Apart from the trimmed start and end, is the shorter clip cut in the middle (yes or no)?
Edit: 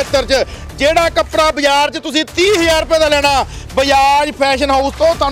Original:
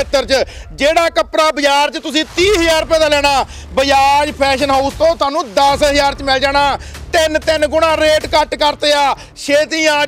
no